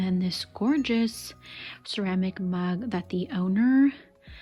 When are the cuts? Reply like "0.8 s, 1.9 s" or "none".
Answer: none